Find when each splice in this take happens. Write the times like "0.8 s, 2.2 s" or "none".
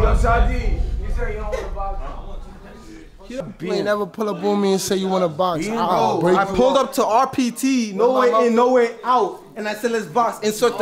3.4 s